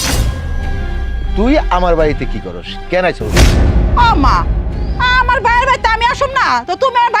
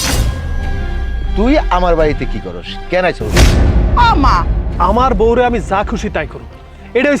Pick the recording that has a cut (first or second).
second